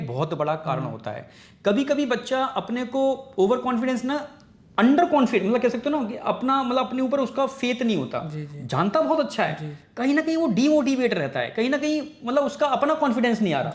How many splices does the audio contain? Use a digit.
0